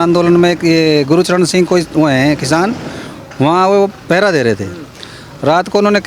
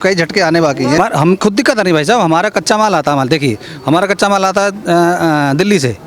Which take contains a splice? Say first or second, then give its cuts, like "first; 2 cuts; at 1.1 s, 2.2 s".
second; 1 cut; at 1.0 s